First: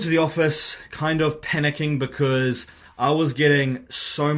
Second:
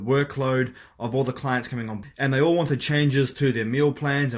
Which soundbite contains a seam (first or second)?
second